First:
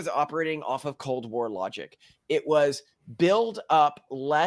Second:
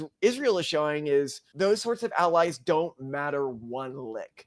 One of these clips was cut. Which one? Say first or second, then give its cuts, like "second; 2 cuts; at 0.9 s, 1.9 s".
second; 1 cut; at 1.4 s